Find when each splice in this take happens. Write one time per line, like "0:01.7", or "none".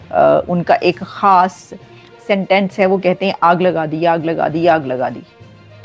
none